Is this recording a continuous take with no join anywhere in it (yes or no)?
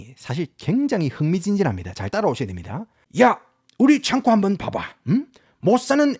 no